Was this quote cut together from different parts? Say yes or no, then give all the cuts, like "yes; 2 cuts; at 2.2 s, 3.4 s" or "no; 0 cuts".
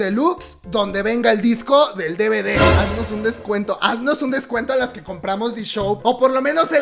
yes; 2 cuts; at 2.7 s, 6.0 s